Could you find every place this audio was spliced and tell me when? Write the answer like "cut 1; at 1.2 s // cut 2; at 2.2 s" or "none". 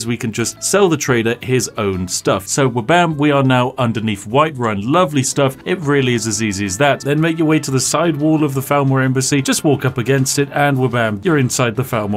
cut 1; at 2.5 s // cut 2; at 7.0 s // cut 3; at 11.2 s